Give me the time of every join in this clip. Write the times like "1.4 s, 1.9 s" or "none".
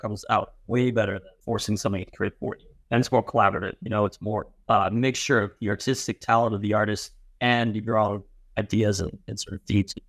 1.3 s, 2.7 s, 4.5 s

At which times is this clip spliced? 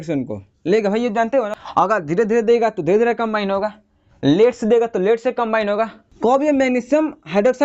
1.6 s, 6.0 s

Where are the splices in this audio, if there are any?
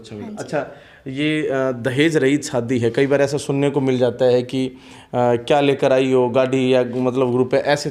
none

